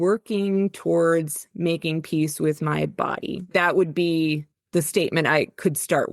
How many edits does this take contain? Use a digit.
1